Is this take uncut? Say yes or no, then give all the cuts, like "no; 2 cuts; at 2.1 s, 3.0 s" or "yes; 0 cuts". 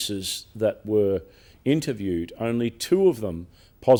yes; 0 cuts